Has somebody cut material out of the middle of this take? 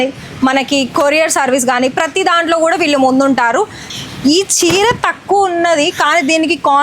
yes; 1 cut; at 3.9 s

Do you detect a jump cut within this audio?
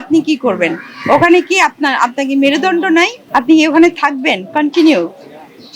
yes; 1 cut; at 3.2 s

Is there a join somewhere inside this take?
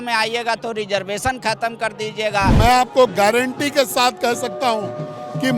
yes; 1 cut; at 2.6 s

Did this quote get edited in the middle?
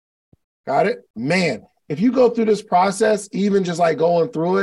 yes; 1 cut; at 1.1 s

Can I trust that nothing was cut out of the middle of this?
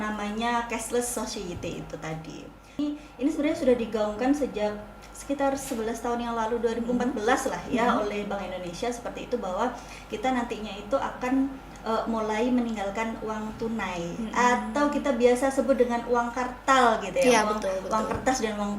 no; 1 cut; at 2.8 s

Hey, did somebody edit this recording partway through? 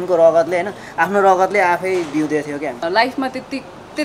yes; 1 cut; at 2.8 s

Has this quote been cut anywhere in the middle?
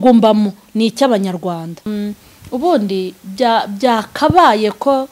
yes; 1 cut; at 1.9 s

